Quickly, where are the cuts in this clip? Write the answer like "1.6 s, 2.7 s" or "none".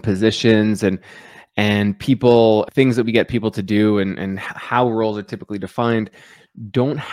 2.7 s